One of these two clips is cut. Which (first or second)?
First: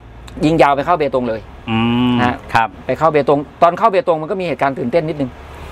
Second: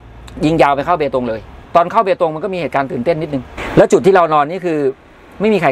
second